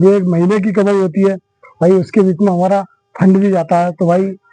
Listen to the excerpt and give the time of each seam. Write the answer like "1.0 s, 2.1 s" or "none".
none